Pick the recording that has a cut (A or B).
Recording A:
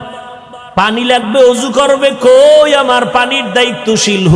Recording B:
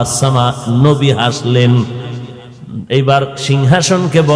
B